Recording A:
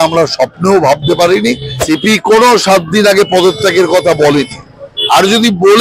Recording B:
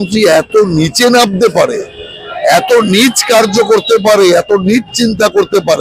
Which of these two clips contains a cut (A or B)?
A